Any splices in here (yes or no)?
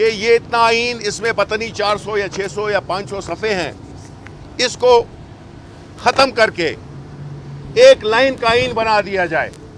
no